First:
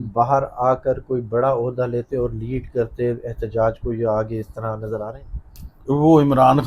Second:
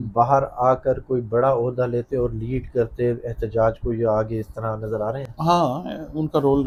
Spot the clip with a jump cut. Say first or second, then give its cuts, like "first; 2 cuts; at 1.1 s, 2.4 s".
first; 1 cut; at 5.2 s